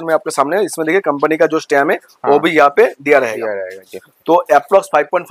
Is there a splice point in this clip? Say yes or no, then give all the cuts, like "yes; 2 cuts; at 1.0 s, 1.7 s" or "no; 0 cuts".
no; 0 cuts